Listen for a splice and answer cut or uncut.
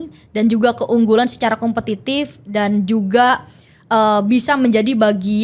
uncut